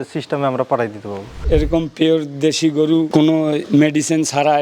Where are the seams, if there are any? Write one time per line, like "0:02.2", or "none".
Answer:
0:01.4